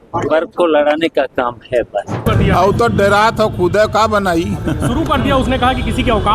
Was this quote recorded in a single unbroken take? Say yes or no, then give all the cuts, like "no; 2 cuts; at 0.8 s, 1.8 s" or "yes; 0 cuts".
no; 1 cut; at 2.2 s